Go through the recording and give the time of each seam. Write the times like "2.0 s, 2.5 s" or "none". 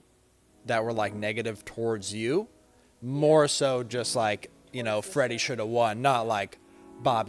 none